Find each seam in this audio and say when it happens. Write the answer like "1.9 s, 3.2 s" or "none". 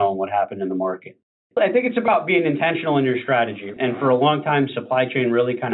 1.4 s